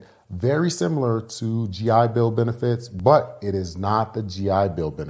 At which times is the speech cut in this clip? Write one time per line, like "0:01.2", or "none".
none